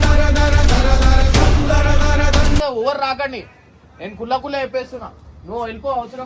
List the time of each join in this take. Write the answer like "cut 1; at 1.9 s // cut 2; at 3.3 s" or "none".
cut 1; at 2.6 s